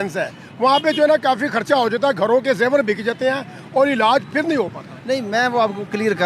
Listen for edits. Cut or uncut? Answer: uncut